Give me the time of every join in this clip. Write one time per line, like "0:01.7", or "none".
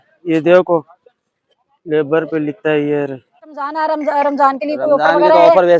0:03.8